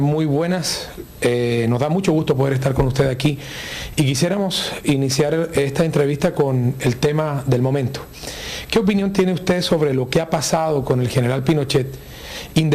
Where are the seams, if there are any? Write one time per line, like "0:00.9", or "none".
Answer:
0:09.2